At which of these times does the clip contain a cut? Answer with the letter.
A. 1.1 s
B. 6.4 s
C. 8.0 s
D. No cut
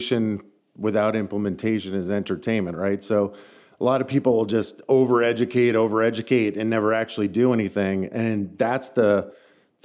D